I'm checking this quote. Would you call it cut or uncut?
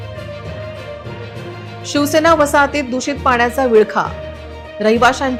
uncut